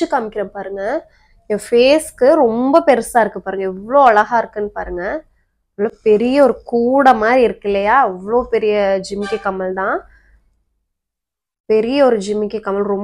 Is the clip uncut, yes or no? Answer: yes